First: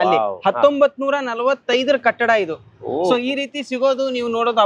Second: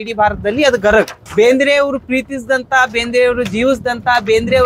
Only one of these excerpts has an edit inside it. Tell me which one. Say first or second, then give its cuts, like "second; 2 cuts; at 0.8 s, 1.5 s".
second; 1 cut; at 1.2 s